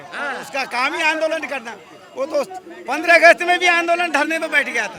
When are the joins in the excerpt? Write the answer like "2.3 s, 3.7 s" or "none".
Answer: none